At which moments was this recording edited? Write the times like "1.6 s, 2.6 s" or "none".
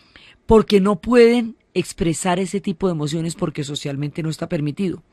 1.0 s